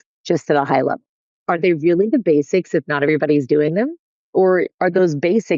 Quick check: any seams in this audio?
yes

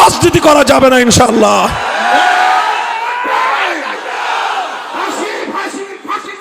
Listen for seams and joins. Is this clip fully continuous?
yes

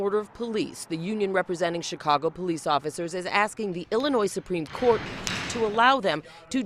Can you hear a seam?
no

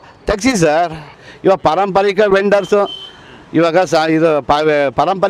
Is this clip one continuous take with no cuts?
no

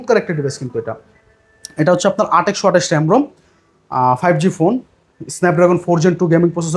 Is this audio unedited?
yes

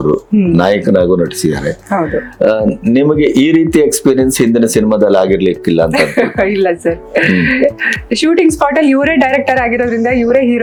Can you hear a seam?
no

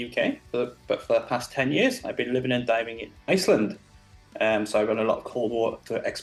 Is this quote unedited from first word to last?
yes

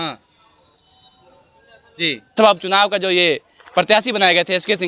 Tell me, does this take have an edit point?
yes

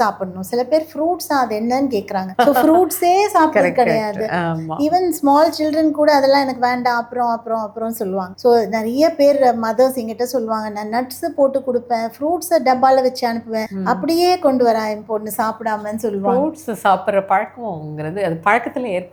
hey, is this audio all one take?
yes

